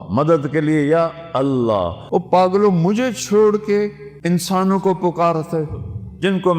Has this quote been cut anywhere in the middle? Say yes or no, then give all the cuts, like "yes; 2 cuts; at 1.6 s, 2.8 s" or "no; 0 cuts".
yes; 2 cuts; at 2.0 s, 4.1 s